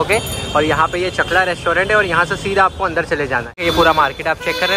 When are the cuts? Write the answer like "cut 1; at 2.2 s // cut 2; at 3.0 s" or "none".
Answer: cut 1; at 3.5 s